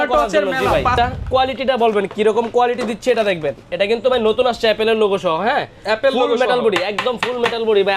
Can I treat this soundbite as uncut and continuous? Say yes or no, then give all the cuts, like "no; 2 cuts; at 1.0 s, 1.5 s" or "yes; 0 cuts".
no; 1 cut; at 0.9 s